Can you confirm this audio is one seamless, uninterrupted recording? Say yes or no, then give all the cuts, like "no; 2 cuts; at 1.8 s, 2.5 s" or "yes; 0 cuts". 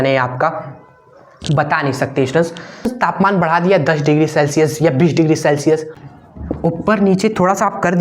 no; 2 cuts; at 2.9 s, 5.9 s